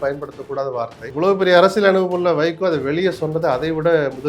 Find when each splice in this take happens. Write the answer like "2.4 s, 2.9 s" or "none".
1.0 s